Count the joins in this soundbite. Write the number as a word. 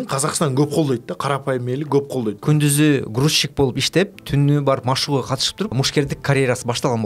two